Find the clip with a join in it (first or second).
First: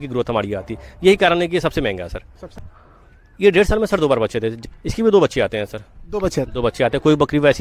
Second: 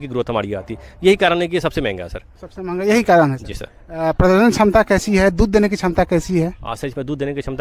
first